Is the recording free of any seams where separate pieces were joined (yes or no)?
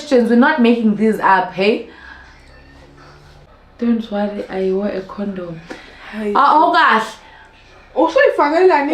yes